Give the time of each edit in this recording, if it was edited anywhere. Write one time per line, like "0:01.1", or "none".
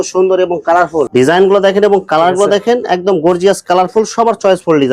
0:01.1